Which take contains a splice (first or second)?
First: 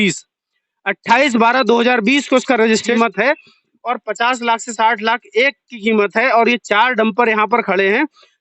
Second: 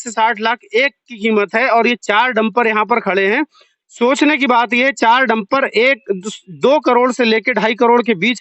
first